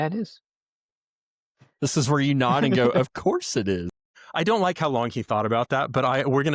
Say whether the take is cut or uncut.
uncut